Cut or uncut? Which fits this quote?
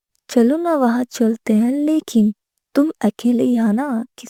uncut